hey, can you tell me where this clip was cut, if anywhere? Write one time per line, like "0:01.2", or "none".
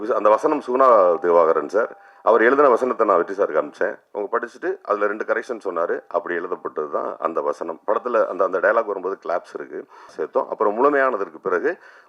0:10.1